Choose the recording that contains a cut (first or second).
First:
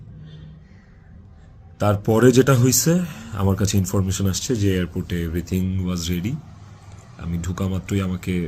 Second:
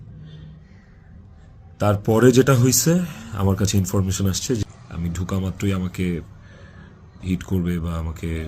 second